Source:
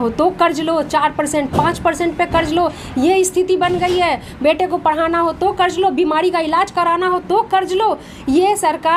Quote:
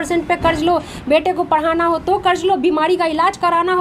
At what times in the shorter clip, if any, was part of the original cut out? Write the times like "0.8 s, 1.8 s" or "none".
0.9 s